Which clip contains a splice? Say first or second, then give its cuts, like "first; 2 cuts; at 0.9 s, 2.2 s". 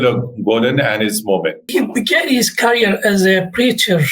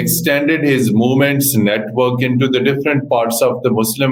first; 1 cut; at 1.6 s